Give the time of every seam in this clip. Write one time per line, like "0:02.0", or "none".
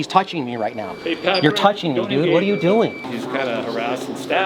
0:03.0